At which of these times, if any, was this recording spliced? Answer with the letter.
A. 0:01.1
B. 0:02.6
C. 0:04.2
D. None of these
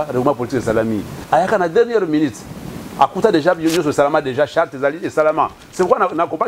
A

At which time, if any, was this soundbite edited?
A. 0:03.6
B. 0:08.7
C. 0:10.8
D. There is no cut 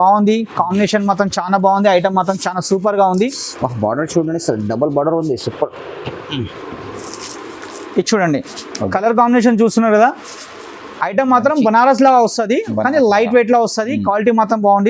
D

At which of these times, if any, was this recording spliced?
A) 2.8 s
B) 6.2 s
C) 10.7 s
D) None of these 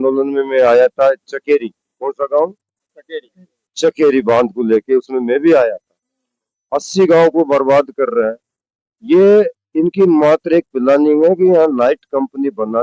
D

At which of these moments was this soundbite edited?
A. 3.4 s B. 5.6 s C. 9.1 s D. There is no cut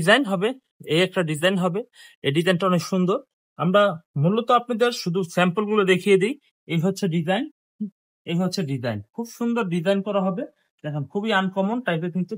D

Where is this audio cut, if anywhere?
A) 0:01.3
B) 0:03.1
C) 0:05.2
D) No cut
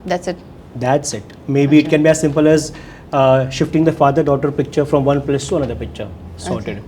D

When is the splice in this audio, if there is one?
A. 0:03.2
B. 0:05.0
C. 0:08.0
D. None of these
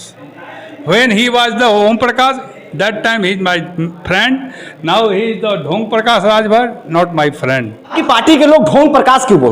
C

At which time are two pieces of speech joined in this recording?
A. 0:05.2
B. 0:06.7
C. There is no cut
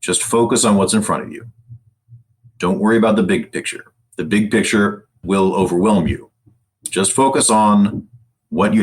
A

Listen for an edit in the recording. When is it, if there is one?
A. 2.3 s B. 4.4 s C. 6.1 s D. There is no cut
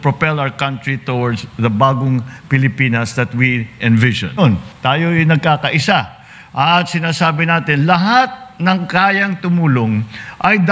B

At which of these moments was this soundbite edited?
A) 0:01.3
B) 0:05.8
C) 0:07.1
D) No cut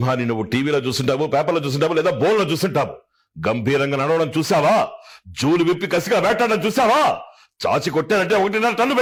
D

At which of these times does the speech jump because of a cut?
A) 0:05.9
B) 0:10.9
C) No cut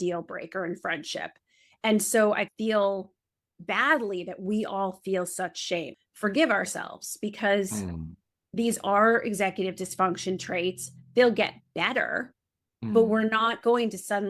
A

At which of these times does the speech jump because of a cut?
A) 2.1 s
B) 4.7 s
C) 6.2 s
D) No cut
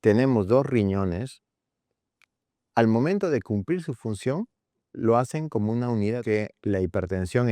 C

